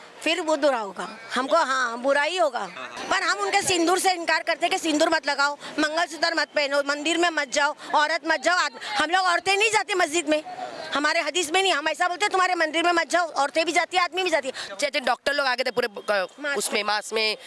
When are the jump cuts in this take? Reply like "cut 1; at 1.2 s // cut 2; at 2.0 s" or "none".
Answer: cut 1; at 2.9 s // cut 2; at 14.6 s